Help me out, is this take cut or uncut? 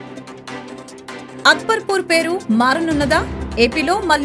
uncut